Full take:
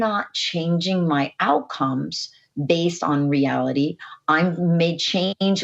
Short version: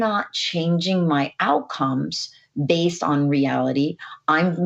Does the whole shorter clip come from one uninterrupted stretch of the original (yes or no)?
yes